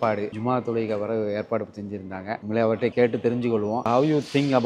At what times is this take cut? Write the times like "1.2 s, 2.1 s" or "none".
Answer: none